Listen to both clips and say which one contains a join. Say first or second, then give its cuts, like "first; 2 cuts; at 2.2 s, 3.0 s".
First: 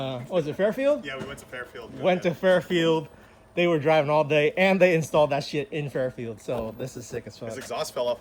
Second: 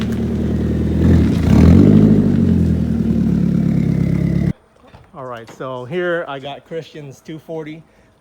second; 1 cut; at 4.6 s